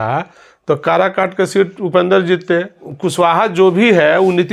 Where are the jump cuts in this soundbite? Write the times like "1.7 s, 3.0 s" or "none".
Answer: 2.9 s